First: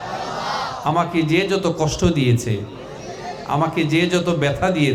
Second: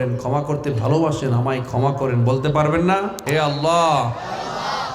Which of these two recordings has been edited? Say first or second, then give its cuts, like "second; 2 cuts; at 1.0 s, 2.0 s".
second; 1 cut; at 3.2 s